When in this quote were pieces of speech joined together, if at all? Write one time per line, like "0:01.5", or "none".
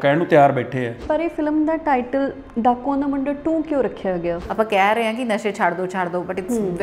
0:01.0
0:04.4